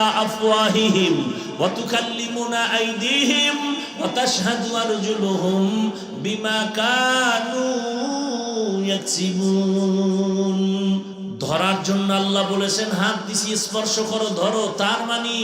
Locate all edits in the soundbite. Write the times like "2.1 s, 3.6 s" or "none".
11.2 s